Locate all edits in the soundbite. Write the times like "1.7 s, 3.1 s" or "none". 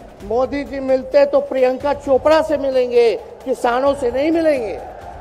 none

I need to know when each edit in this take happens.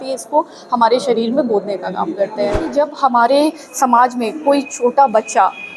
2.7 s

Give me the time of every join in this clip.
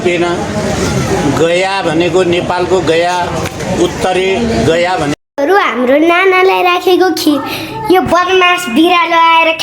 5.1 s

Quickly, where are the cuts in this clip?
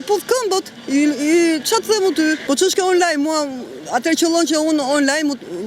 2.4 s

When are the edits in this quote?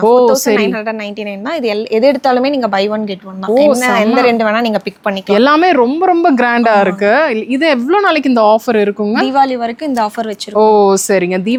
none

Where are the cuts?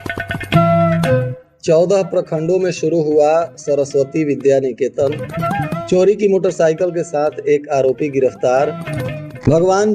1.4 s

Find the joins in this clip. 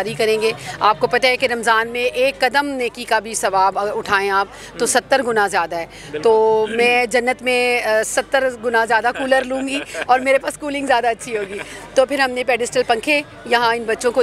none

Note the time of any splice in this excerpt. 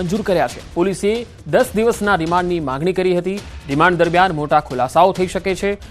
4.7 s

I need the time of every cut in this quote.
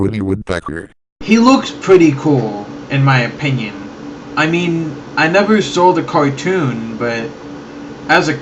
0.9 s

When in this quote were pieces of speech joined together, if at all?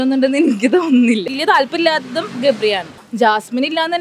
1.4 s, 3.0 s

